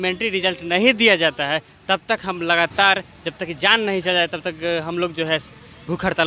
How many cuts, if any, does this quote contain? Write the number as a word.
zero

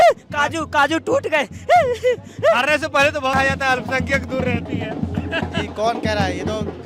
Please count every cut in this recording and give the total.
one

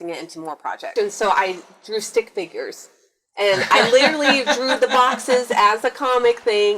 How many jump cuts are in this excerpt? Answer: one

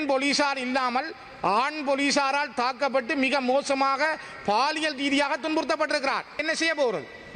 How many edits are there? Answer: one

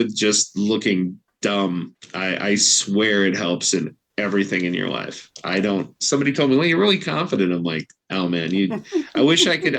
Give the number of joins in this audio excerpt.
two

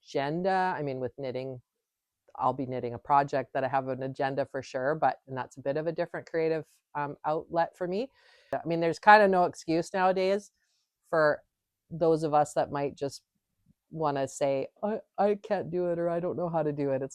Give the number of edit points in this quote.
one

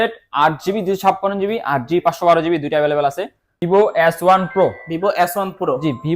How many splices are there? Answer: one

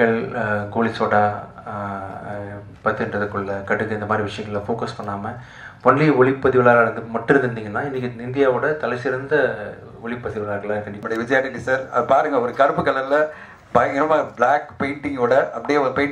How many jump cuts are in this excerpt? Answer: one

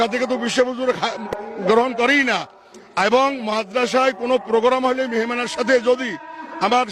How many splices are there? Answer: one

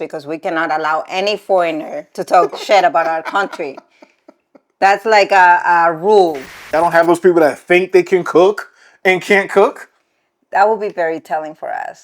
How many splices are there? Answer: one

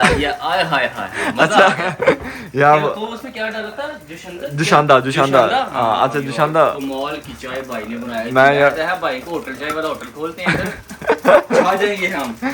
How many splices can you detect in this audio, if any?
zero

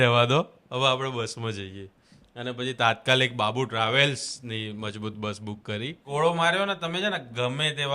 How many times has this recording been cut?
one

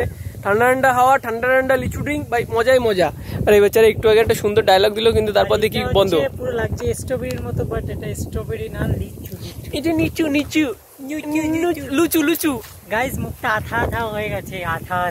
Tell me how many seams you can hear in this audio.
zero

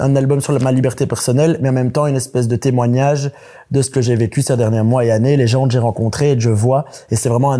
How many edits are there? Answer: zero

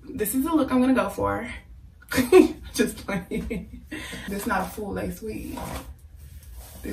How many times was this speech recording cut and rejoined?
one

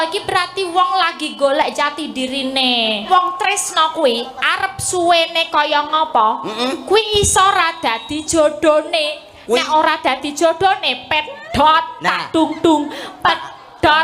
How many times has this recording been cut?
one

